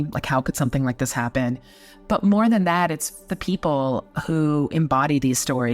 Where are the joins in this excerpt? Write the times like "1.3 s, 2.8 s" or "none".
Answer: 1.3 s, 3.3 s

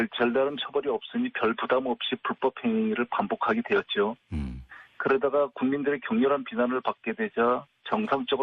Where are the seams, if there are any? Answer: 2.3 s

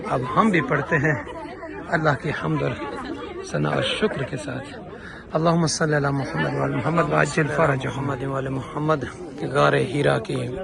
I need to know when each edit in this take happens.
7.9 s

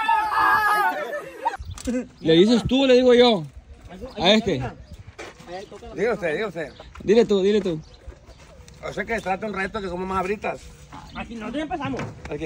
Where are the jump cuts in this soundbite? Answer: 1.7 s

